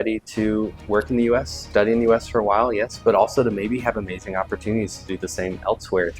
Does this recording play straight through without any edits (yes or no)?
yes